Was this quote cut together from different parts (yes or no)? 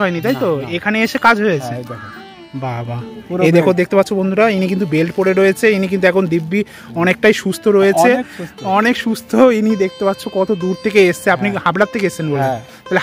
no